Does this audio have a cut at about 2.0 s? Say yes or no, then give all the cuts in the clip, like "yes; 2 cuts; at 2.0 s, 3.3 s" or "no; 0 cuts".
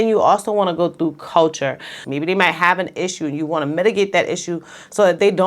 yes; 1 cut; at 2.0 s